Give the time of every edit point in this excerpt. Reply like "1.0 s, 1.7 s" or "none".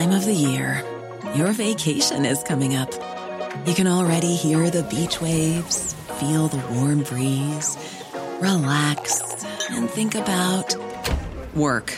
none